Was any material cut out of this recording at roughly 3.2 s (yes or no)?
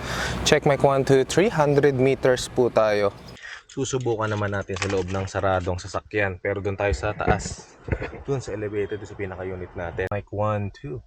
yes